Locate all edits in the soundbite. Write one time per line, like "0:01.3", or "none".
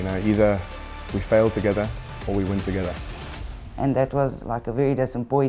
0:03.1
0:04.4